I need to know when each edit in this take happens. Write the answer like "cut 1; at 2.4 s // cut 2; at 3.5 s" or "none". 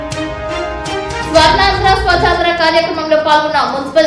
cut 1; at 1.3 s

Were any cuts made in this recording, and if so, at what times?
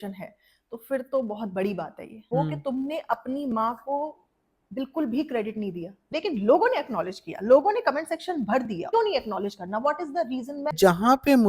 cut 1; at 2.2 s // cut 2; at 6.1 s // cut 3; at 8.9 s // cut 4; at 10.8 s

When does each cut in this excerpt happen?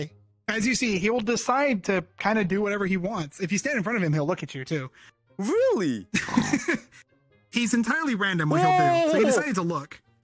none

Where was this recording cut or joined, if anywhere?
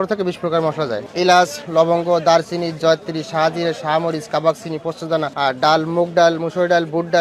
cut 1; at 1.1 s // cut 2; at 5.3 s

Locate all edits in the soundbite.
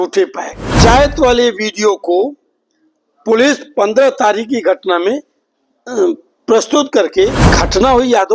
cut 1; at 0.8 s // cut 2; at 7.4 s

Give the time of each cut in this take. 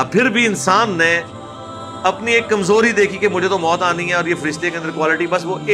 none

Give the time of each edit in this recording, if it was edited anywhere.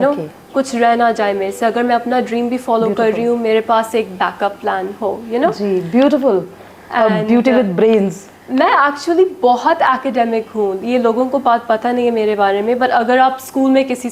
none

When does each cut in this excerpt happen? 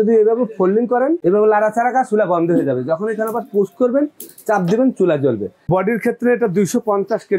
cut 1; at 1.2 s // cut 2; at 5.6 s

